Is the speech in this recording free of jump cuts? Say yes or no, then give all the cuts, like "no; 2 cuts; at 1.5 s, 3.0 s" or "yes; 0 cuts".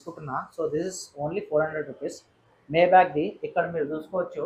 yes; 0 cuts